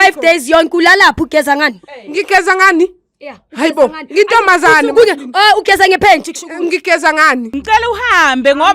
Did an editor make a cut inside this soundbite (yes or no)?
yes